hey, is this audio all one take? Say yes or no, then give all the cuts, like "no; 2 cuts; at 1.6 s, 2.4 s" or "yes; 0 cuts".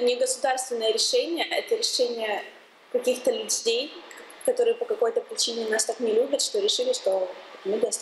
yes; 0 cuts